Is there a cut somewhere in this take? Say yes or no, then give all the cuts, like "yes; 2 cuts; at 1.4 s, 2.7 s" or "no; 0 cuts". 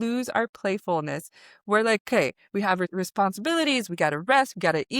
yes; 1 cut; at 2.9 s